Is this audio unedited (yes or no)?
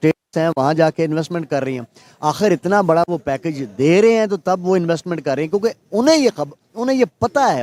yes